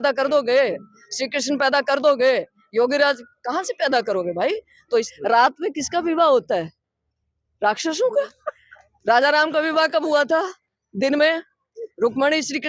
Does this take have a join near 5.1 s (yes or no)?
yes